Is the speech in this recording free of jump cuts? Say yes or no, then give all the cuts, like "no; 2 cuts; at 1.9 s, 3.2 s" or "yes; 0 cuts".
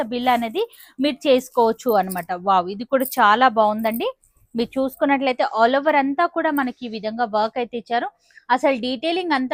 yes; 0 cuts